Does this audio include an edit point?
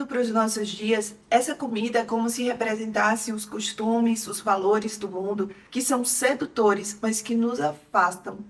no; 0 cuts

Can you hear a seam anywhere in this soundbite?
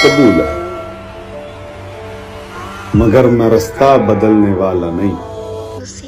no; 0 cuts

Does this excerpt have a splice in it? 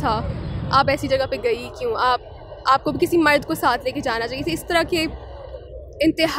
no; 0 cuts

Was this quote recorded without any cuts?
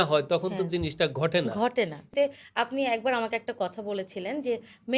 no; 1 cut; at 2.1 s

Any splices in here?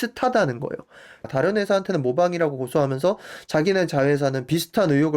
yes; 1 cut; at 1.2 s

